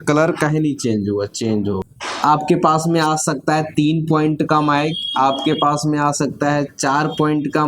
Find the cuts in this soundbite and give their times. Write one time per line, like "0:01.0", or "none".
0:01.9